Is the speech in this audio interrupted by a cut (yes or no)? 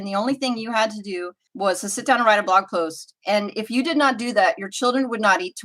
yes